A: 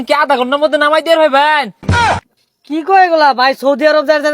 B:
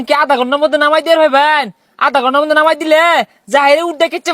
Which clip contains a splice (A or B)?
A